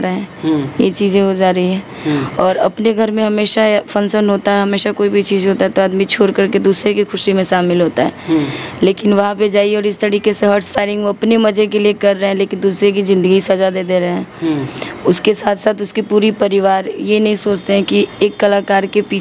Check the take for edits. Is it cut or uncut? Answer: uncut